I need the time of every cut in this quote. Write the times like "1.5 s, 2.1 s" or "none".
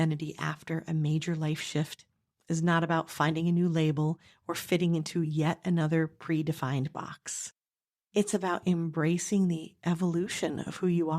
none